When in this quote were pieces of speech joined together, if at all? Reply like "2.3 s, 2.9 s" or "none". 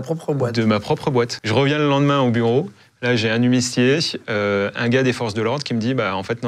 1.3 s